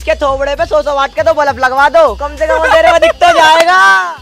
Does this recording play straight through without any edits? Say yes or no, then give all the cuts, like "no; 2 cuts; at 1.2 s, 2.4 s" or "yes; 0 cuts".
yes; 0 cuts